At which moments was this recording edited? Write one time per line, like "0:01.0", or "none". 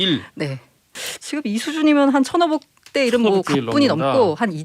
0:01.0